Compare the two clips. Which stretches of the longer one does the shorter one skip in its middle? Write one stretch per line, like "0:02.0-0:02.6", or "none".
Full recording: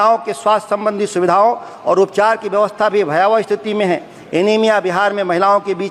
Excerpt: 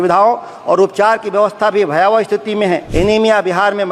0:04.0-0:04.2